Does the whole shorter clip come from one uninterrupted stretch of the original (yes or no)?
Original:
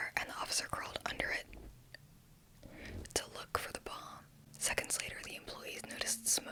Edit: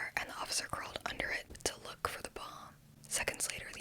no